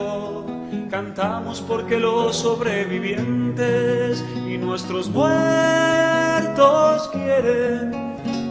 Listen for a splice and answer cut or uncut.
uncut